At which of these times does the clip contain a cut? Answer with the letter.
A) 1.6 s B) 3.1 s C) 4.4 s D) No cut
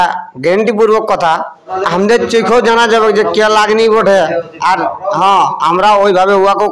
A